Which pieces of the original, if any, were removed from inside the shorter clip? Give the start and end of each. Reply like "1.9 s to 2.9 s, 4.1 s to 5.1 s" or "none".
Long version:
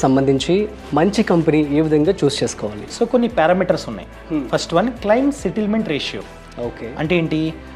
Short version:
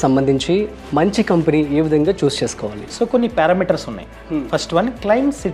none